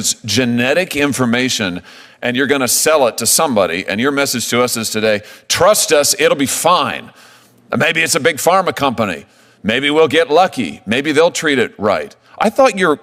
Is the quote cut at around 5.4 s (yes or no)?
no